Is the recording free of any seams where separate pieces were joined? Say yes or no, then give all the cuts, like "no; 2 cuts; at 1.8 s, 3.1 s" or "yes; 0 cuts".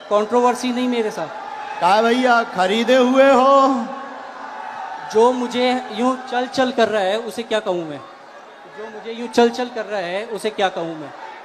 yes; 0 cuts